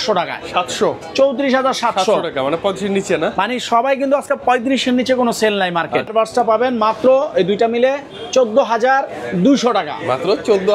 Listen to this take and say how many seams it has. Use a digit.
1